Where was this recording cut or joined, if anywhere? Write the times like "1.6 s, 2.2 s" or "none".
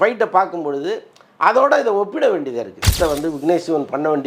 3.0 s